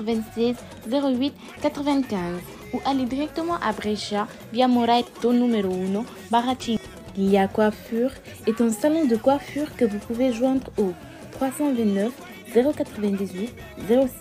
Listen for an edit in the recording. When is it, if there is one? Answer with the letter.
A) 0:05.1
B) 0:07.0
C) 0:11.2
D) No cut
B